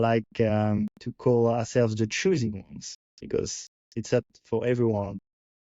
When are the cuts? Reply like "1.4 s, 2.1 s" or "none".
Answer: 1.0 s